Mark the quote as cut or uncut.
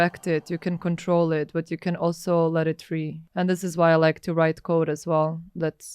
cut